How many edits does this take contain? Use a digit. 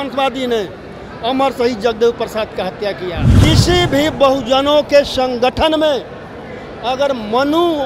1